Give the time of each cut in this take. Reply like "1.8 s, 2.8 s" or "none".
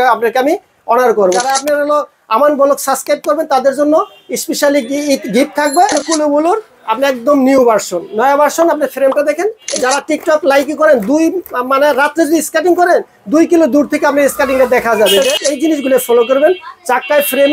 1.4 s, 6.0 s, 9.7 s, 15.4 s